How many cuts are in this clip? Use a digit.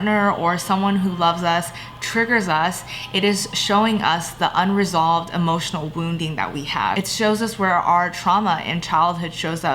1